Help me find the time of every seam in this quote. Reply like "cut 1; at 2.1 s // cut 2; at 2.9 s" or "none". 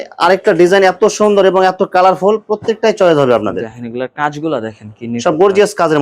none

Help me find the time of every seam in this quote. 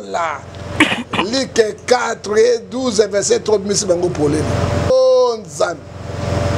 cut 1; at 4.9 s

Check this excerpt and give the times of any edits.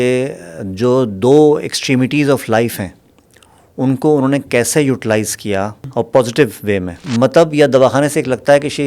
cut 1; at 5.8 s // cut 2; at 7.0 s

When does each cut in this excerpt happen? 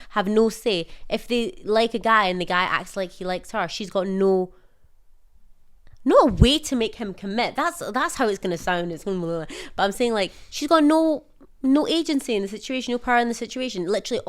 none

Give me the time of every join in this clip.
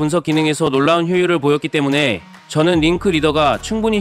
none

